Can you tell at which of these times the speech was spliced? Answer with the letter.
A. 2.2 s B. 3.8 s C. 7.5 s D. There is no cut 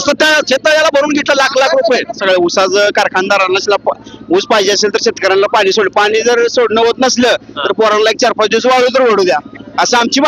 A